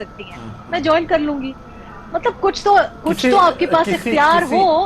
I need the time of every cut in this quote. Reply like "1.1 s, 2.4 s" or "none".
none